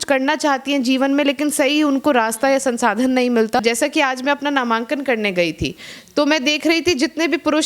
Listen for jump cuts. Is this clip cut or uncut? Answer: cut